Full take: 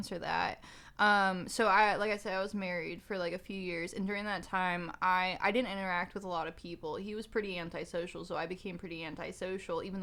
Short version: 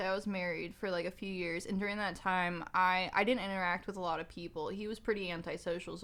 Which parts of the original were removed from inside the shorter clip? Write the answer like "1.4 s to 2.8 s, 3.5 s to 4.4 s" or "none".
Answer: none